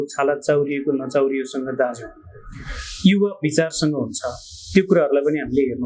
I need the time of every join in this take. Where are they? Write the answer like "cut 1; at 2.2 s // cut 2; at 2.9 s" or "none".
none

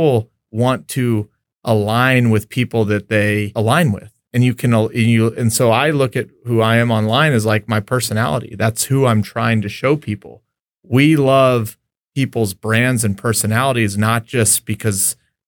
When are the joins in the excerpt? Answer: cut 1; at 3.5 s

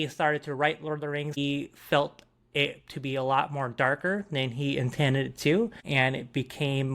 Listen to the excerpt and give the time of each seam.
cut 1; at 1.4 s // cut 2; at 5.8 s

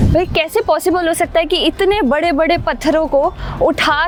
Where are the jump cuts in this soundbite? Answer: none

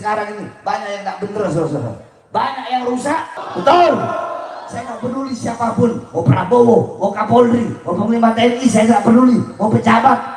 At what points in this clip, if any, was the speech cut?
cut 1; at 3.4 s

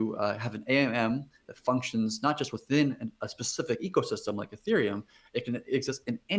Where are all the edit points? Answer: none

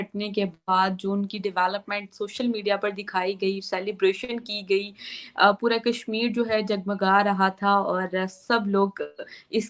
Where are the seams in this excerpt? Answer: none

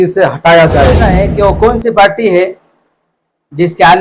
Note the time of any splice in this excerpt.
cut 1; at 1.3 s

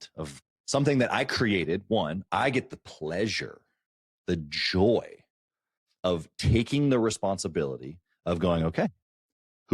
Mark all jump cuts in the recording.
cut 1; at 2.2 s

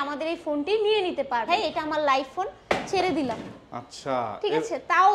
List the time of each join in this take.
cut 1; at 1.5 s

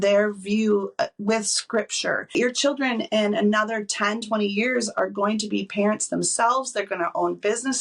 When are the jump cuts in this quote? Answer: cut 1; at 2.3 s

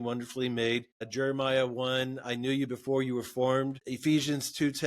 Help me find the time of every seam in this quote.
cut 1; at 1.1 s // cut 2; at 3.9 s

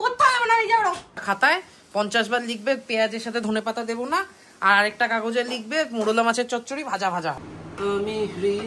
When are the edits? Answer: cut 1; at 1.2 s // cut 2; at 7.5 s

